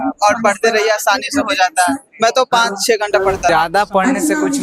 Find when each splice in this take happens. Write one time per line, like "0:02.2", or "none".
0:03.5